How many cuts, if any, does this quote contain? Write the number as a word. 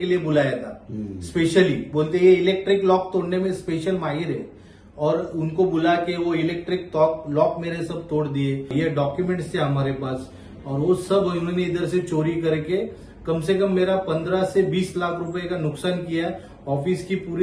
one